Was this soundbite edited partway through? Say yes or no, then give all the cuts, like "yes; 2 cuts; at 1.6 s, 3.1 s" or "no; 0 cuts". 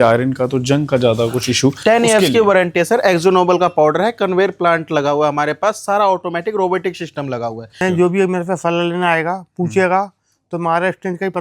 yes; 1 cut; at 7.8 s